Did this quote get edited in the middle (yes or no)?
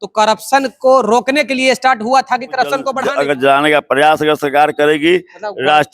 yes